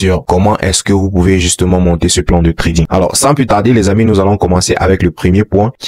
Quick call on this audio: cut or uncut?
uncut